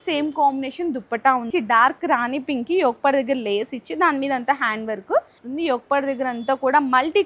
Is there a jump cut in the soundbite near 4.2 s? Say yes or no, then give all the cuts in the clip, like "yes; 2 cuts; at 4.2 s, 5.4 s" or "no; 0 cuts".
no; 2 cuts; at 1.5 s, 5.4 s